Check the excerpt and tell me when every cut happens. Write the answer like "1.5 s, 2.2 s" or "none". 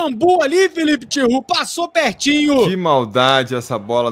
2.7 s

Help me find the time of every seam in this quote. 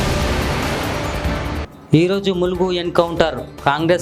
1.2 s

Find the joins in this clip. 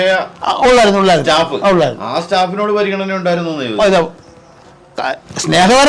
none

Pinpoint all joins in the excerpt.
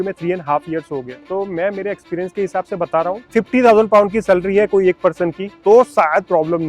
1.1 s, 3.2 s, 5.5 s

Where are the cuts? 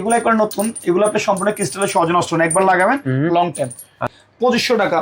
4.1 s

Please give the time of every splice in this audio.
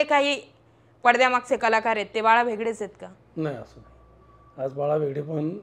none

